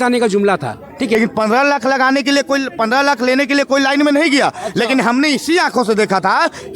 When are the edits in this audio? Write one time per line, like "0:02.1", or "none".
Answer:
0:01.1